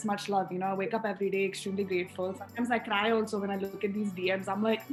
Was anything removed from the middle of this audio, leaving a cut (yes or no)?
no